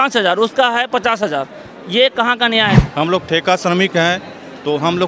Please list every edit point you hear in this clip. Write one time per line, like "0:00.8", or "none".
0:02.7